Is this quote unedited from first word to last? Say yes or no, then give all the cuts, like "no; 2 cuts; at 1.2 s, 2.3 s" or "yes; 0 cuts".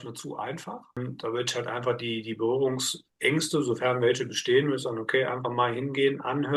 no; 1 cut; at 1.0 s